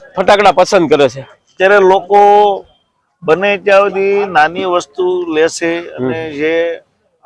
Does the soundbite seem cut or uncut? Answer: uncut